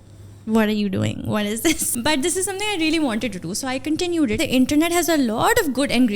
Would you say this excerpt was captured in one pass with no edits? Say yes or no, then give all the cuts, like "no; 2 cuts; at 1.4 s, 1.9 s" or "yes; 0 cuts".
no; 2 cuts; at 1.9 s, 4.4 s